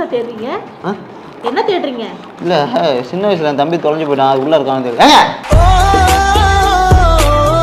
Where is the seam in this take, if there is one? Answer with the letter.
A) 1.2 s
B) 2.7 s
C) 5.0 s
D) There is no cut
D